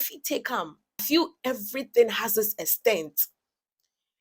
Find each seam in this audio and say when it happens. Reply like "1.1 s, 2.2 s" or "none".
1.0 s